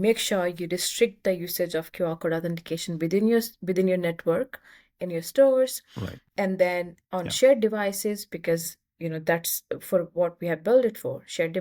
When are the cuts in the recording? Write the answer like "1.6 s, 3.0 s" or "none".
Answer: none